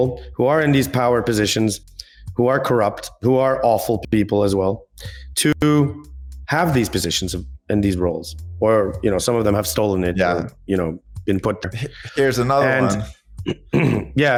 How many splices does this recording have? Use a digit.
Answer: 0